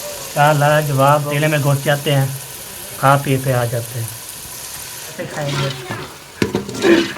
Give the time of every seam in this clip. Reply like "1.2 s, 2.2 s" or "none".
1.3 s, 5.2 s